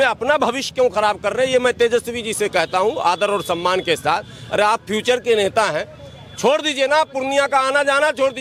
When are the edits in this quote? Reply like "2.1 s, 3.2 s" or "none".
none